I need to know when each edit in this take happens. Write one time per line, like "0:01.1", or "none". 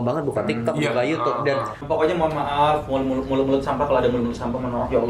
0:01.8